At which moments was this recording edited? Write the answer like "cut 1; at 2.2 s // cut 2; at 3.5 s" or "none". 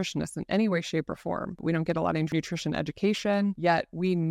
cut 1; at 1.6 s // cut 2; at 2.3 s // cut 3; at 3.6 s